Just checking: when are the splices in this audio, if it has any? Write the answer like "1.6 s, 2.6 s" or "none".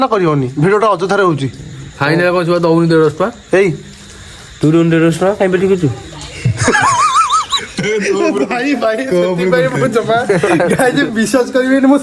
none